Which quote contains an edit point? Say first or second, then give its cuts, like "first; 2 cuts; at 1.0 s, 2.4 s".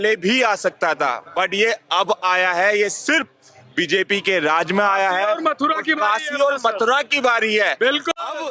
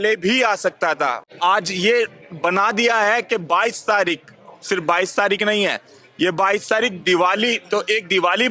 second; 1 cut; at 1.2 s